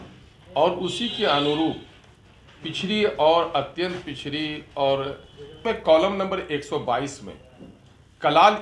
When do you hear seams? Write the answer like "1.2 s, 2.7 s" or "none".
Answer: 5.6 s